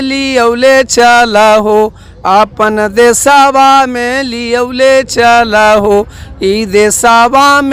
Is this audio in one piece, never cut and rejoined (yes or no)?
yes